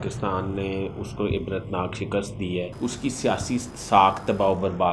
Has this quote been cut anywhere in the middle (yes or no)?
yes